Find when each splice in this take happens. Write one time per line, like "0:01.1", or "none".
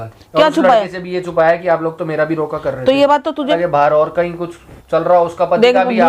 0:03.5